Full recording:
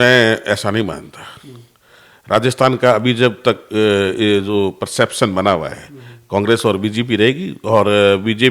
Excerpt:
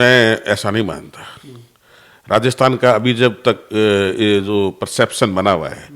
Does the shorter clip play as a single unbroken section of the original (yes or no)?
yes